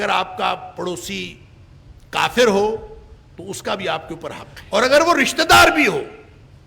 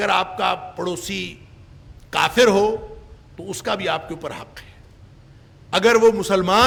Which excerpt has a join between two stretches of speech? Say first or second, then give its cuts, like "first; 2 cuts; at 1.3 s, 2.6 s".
first; 1 cut; at 4.5 s